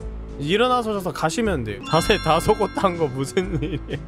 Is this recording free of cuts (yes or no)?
no